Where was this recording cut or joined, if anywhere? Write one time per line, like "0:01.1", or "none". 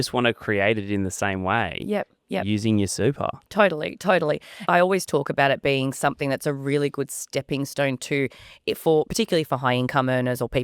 0:04.6